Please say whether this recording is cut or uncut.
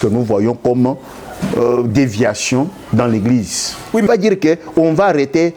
cut